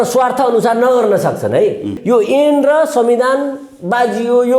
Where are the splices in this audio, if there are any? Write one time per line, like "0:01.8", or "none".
0:02.0